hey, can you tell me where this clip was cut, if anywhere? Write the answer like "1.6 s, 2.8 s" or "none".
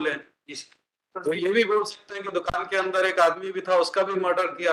none